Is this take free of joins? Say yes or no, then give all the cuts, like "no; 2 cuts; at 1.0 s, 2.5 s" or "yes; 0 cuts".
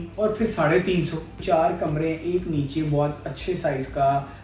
no; 1 cut; at 1.4 s